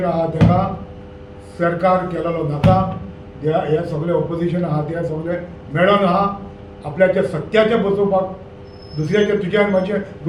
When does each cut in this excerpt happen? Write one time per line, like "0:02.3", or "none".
none